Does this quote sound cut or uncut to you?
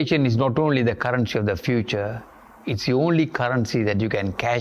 uncut